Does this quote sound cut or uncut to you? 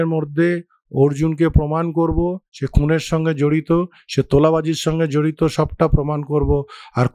uncut